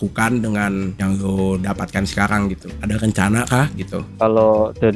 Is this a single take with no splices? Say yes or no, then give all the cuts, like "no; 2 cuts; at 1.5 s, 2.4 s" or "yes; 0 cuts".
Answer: no; 2 cuts; at 0.9 s, 2.7 s